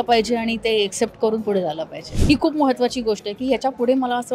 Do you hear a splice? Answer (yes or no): yes